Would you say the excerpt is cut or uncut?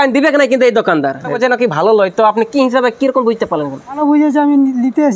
cut